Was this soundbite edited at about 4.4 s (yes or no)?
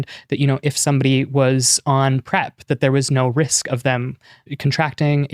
yes